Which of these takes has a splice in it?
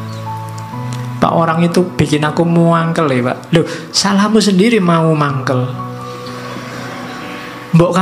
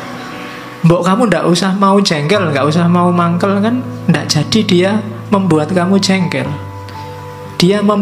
first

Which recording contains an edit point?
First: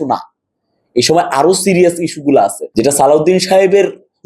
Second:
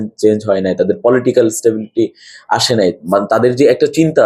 first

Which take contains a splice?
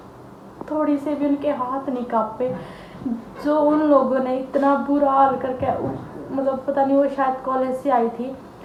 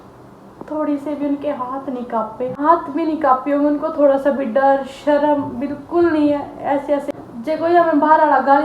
second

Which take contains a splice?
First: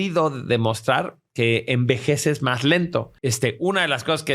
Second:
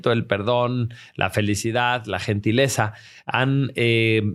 first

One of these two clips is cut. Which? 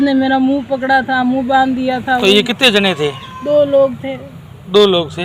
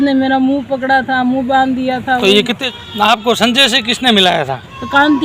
second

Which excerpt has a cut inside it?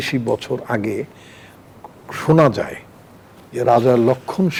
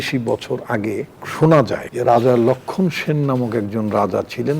second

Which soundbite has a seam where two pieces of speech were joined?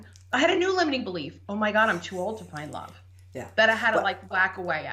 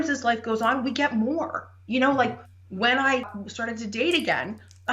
second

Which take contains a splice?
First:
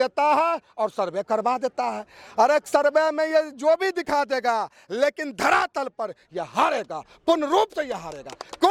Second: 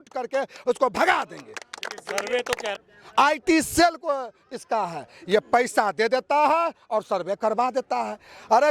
second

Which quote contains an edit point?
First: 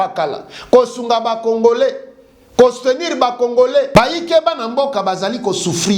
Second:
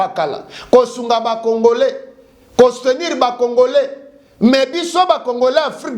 first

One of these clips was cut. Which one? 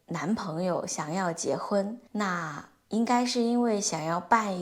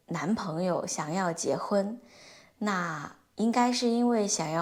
first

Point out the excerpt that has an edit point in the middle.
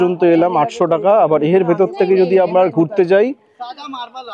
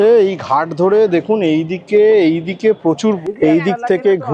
second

